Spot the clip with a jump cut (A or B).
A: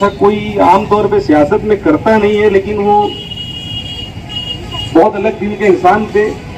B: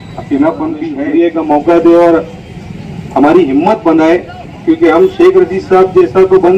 B